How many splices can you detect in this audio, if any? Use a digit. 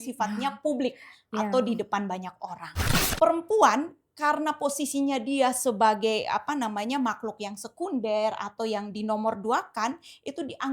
1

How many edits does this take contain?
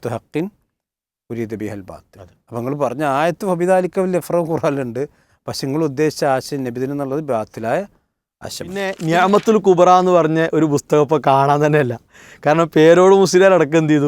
1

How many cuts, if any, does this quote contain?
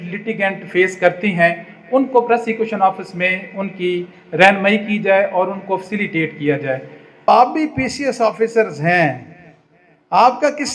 1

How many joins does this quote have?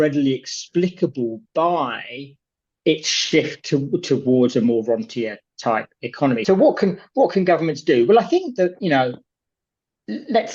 1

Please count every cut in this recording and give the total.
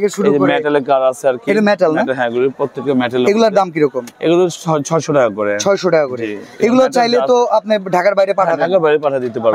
0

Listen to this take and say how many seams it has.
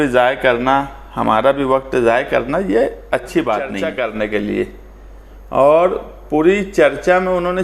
1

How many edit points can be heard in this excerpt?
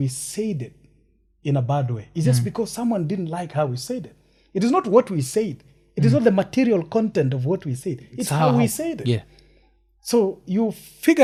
0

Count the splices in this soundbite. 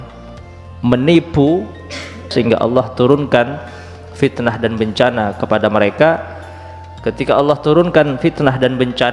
1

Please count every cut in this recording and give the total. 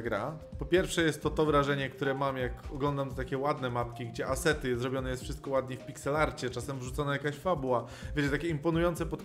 0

